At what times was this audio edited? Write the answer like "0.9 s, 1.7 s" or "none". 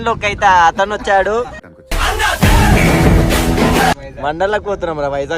1.4 s, 3.9 s

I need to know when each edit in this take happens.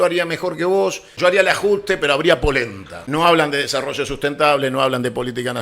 1.1 s, 3.0 s

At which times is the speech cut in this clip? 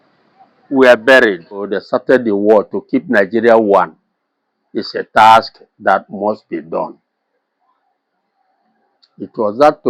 1.7 s

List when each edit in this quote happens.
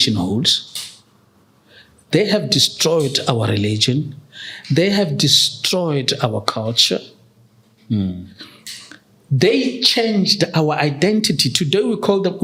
none

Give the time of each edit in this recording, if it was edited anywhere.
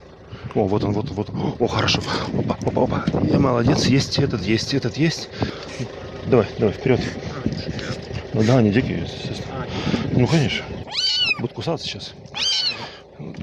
5.5 s, 10.8 s

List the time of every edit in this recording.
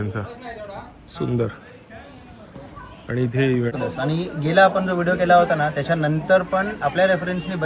3.7 s

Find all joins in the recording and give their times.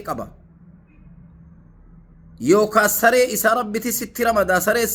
none

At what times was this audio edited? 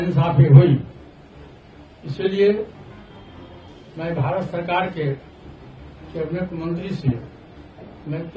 none

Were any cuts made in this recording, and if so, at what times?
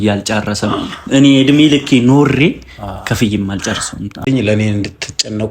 4.2 s

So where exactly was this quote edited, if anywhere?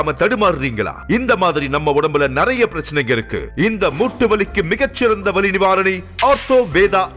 6.1 s

